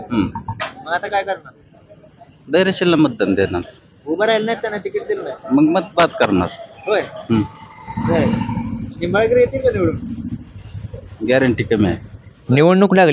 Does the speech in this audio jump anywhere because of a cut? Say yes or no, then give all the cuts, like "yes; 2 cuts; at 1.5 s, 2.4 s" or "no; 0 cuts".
no; 0 cuts